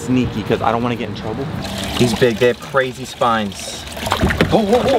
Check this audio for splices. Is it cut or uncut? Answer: cut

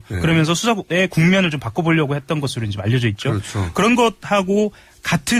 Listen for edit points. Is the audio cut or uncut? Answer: uncut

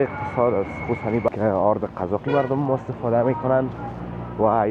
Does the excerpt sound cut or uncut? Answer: cut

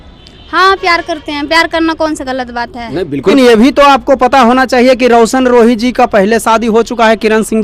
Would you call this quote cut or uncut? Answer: cut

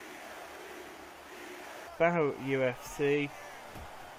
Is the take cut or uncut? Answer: uncut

